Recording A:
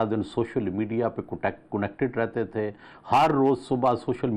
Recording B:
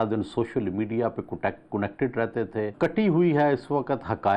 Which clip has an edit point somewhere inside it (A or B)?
B